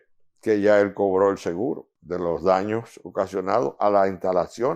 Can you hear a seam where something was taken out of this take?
yes; 1 cut; at 1.9 s

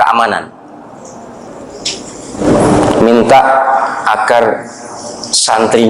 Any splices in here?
yes; 1 cut; at 2.4 s

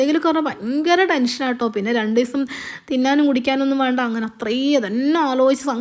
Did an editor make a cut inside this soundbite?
no; 0 cuts

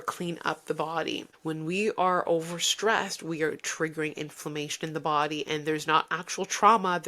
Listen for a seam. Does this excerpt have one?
yes; 1 cut; at 1.3 s

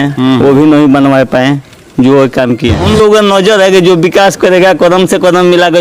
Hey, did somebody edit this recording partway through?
yes; 1 cut; at 2.8 s

